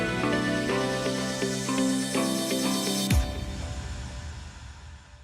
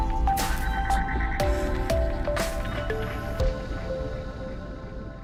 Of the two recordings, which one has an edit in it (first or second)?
first